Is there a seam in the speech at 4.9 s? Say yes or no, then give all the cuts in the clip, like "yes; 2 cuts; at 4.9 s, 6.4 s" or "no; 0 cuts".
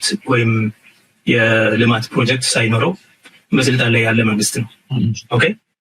yes; 1 cut; at 4.9 s